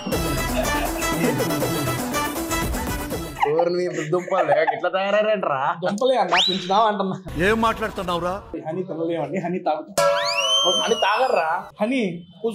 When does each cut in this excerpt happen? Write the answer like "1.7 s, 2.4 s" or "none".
7.3 s, 8.5 s, 11.7 s